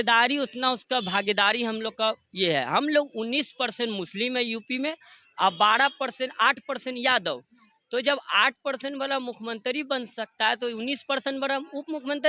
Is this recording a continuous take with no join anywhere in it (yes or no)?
yes